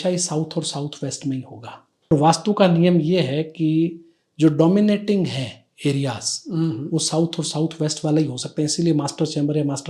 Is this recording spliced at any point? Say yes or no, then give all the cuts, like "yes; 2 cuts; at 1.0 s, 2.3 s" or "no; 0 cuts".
yes; 1 cut; at 2.1 s